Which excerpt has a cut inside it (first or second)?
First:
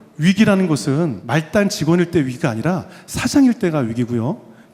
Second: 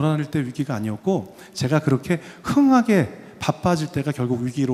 first